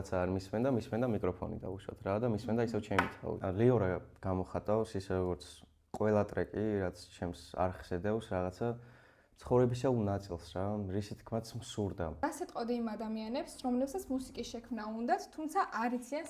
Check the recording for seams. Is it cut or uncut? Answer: cut